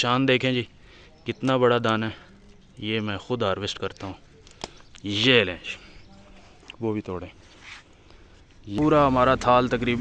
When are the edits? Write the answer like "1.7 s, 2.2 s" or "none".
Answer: 8.6 s